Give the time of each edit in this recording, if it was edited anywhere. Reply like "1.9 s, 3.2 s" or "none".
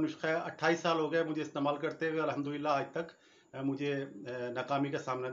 none